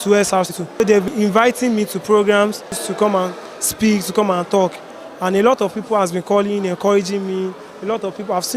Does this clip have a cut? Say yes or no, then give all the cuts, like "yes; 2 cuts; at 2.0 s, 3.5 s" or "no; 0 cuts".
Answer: yes; 2 cuts; at 1.1 s, 2.8 s